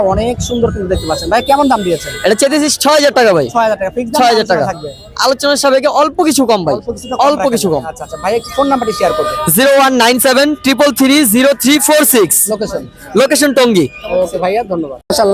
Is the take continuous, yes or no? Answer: yes